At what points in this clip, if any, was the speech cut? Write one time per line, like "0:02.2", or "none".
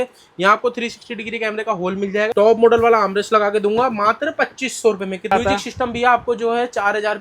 0:02.3
0:05.3